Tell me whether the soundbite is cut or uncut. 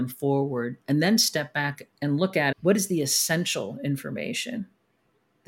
cut